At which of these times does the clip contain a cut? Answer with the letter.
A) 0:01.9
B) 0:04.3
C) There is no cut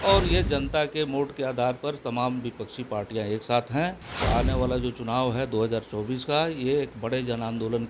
B